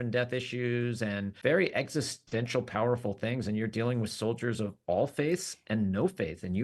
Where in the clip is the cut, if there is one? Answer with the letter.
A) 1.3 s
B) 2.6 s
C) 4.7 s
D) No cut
A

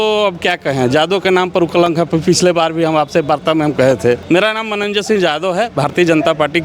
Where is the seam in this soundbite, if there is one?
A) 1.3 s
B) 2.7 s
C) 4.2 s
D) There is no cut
C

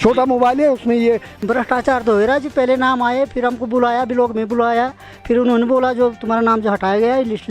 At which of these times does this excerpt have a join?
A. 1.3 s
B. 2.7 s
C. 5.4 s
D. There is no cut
A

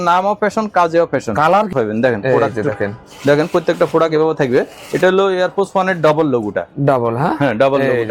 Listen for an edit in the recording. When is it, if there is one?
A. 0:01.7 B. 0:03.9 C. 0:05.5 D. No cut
A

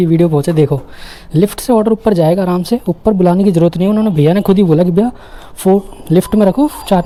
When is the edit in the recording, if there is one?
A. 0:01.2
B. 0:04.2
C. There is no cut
C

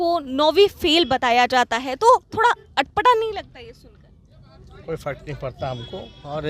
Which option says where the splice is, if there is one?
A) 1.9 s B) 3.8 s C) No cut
C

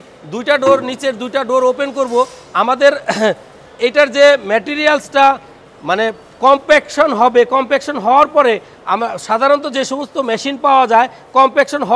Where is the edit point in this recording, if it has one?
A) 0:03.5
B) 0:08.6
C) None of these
C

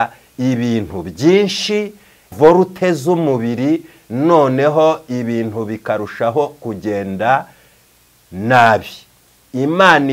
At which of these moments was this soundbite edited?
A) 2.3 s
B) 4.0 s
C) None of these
A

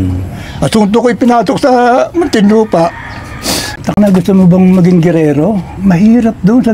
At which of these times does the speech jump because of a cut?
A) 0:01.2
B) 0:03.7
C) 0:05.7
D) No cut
B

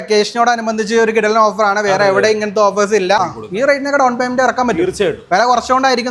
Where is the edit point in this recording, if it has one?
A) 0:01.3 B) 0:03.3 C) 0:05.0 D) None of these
B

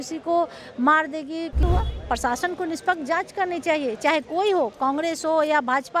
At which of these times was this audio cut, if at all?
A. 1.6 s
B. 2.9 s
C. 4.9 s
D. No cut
A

